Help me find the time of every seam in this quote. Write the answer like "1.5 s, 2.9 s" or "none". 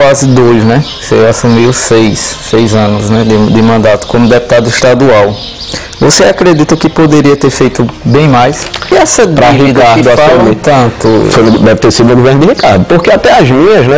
8.9 s